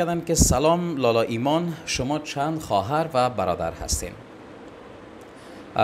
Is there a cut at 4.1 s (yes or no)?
no